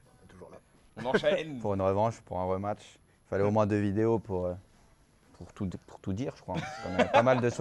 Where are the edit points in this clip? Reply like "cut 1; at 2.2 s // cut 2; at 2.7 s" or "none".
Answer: none

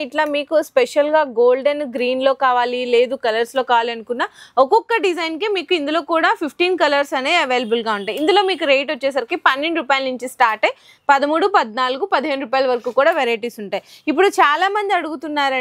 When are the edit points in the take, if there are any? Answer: none

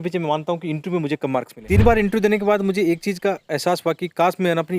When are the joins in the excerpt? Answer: cut 1; at 1.5 s

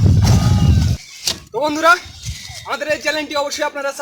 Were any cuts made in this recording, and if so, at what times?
cut 1; at 1.1 s

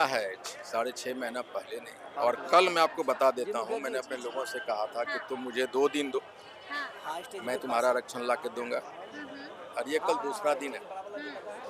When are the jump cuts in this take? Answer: cut 1; at 2.1 s

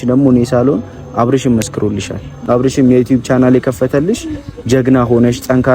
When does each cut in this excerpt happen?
cut 1; at 2.3 s

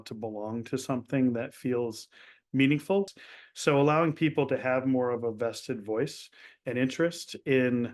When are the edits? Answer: cut 1; at 3.1 s

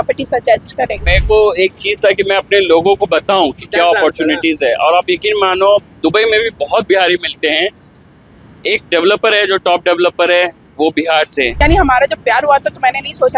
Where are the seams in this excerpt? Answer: cut 1; at 1.0 s // cut 2; at 11.5 s

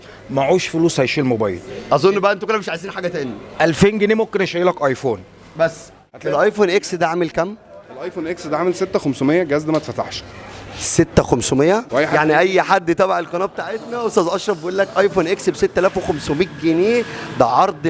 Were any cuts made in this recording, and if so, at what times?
cut 1; at 6.1 s // cut 2; at 11.9 s

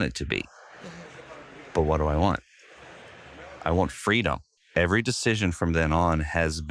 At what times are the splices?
cut 1; at 4.5 s

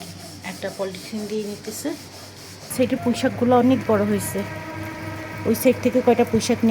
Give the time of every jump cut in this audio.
cut 1; at 2.7 s

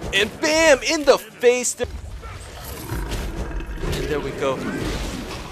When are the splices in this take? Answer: cut 1; at 1.7 s

